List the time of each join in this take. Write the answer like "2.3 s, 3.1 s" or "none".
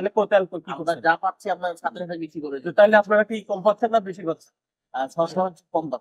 none